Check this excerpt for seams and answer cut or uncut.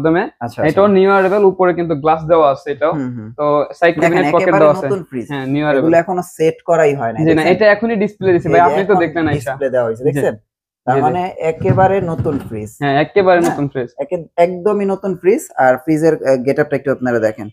uncut